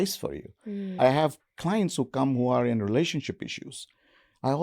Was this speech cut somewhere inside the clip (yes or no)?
yes